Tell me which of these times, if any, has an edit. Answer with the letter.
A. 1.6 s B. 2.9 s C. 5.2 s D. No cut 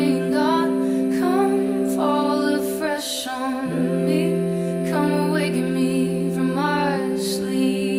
D